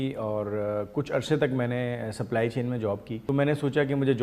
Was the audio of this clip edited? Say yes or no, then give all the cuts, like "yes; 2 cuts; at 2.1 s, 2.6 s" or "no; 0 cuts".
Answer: yes; 1 cut; at 3.1 s